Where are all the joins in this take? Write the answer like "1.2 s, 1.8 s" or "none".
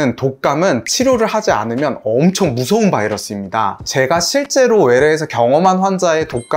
none